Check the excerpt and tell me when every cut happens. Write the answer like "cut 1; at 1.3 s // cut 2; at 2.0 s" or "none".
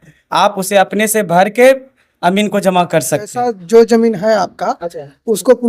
cut 1; at 3.3 s

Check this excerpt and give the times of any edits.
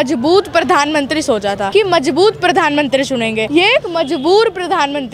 cut 1; at 1.6 s // cut 2; at 3.5 s

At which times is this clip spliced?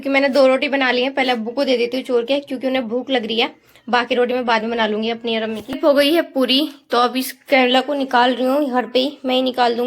cut 1; at 5.8 s

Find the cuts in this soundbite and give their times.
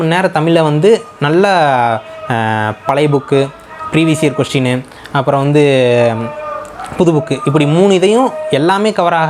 none

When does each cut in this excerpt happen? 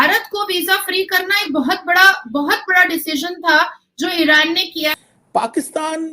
cut 1; at 4.9 s

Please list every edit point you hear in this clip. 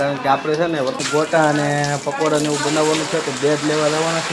cut 1; at 1.0 s

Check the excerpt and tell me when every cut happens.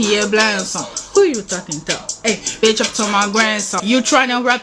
cut 1; at 3.7 s

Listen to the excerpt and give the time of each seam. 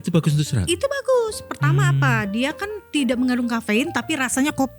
none

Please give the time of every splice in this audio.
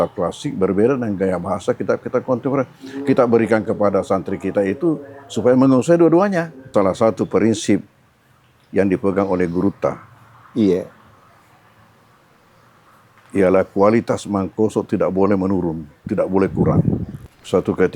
cut 1; at 6.7 s // cut 2; at 17.1 s

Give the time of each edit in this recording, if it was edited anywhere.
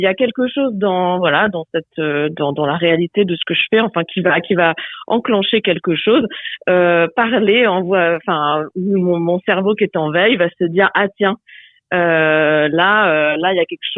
none

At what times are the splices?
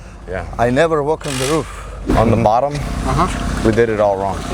cut 1; at 1.8 s

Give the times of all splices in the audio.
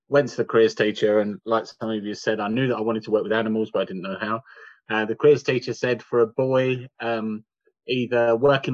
none

